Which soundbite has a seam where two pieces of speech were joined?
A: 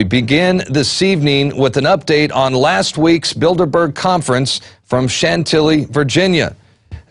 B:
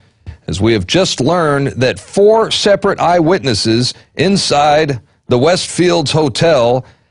B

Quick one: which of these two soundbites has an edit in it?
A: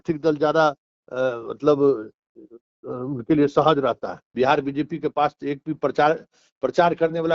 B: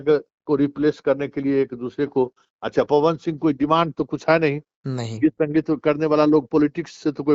A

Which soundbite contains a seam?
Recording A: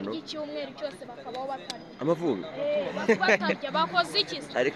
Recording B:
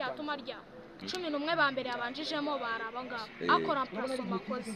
B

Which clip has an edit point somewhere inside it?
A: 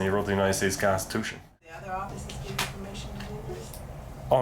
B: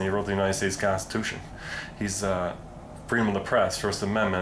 A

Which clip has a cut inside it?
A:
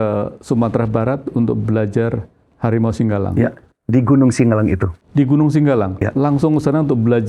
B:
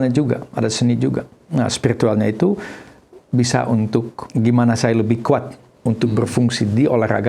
B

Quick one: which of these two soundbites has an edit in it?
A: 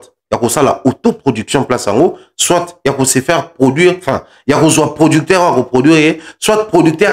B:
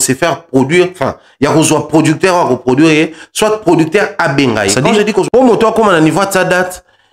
B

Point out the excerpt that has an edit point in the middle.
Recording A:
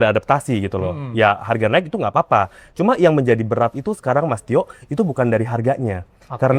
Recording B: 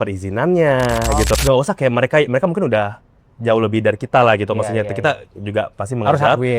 B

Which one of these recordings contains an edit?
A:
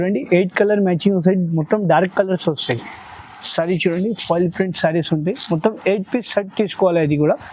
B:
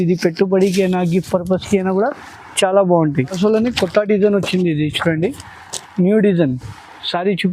B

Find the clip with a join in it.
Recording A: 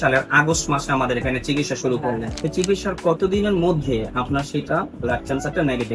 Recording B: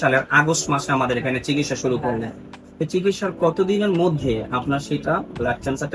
A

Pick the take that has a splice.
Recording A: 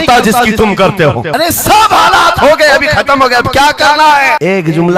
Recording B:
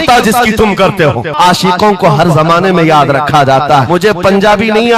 B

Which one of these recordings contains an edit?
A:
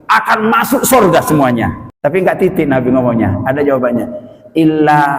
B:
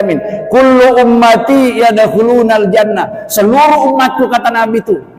A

